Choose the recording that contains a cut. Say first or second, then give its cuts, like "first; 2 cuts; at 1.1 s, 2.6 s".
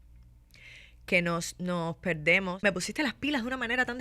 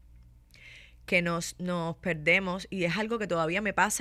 first; 1 cut; at 2.6 s